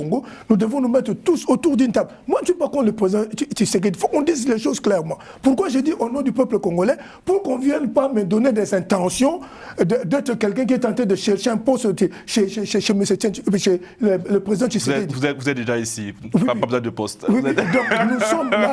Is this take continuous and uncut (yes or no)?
yes